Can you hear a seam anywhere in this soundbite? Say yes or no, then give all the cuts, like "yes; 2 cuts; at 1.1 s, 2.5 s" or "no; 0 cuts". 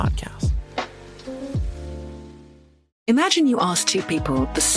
yes; 1 cut; at 2.9 s